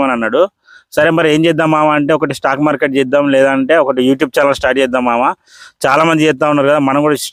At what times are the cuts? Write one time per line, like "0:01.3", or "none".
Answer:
none